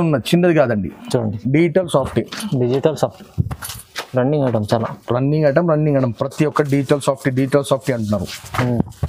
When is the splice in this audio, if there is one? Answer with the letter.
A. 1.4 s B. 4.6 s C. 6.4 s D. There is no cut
A